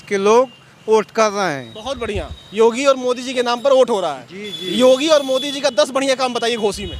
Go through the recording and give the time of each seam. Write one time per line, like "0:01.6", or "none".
none